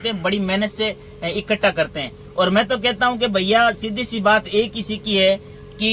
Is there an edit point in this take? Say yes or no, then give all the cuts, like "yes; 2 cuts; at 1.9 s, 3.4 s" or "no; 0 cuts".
no; 0 cuts